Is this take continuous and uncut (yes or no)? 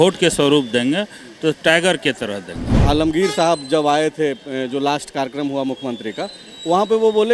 no